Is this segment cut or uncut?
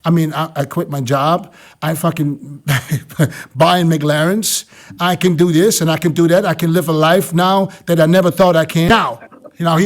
cut